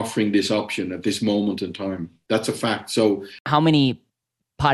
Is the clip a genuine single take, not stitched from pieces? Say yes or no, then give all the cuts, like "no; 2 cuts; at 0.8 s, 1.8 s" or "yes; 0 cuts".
no; 1 cut; at 3.4 s